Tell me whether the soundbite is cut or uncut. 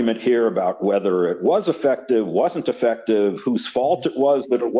uncut